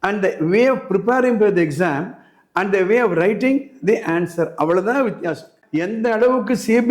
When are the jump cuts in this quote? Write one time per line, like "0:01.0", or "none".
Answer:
0:05.6